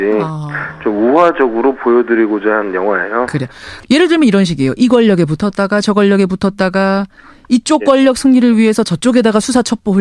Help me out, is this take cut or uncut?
cut